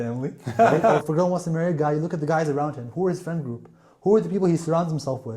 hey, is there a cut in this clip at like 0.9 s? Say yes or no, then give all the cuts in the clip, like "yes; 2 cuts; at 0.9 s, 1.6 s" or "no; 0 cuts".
yes; 1 cut; at 0.9 s